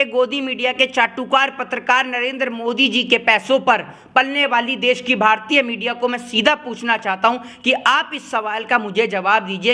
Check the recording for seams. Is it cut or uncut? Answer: uncut